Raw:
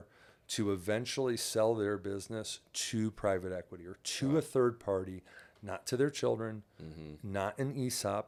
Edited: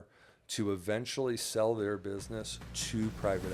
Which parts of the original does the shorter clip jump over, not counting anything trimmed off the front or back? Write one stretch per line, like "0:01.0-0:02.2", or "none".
none